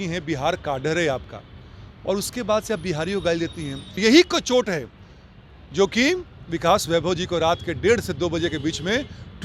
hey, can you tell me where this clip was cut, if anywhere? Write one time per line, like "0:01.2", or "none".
0:04.0